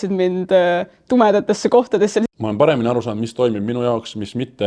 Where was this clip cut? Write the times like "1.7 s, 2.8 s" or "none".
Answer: 2.3 s